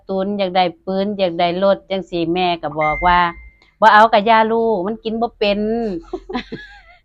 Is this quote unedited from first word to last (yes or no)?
yes